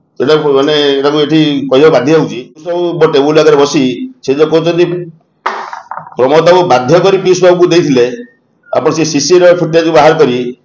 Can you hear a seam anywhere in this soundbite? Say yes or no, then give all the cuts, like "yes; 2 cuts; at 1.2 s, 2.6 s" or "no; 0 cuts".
yes; 1 cut; at 2.8 s